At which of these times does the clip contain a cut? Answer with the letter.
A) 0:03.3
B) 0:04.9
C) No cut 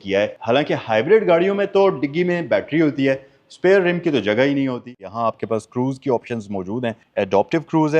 B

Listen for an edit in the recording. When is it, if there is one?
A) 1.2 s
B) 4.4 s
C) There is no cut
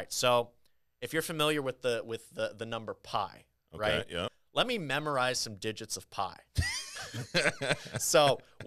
B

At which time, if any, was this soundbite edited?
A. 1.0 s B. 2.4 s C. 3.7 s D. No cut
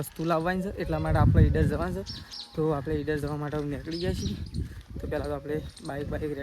D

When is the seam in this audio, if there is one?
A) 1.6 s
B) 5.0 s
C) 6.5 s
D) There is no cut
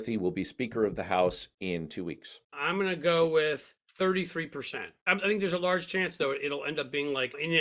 D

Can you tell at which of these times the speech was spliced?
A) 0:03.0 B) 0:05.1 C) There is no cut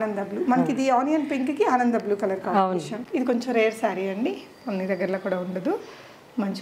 A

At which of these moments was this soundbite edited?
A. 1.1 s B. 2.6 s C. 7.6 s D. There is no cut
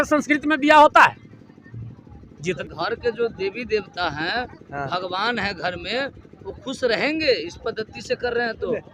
B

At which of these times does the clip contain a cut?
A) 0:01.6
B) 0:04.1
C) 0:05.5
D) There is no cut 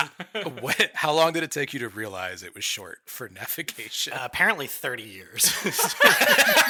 D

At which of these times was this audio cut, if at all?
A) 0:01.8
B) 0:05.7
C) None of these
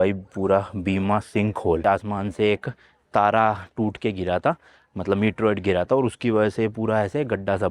A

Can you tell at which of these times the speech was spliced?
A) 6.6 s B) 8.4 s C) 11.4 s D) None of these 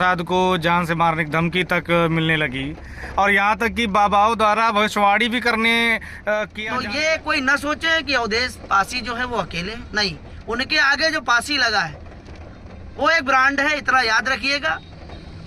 A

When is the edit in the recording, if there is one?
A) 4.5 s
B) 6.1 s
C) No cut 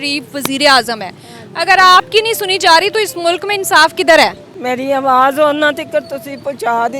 A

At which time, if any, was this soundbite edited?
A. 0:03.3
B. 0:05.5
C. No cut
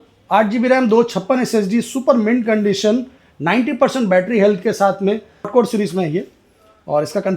B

